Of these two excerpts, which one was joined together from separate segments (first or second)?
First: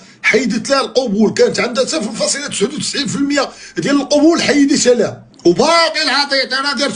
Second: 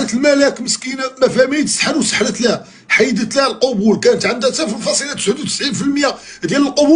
first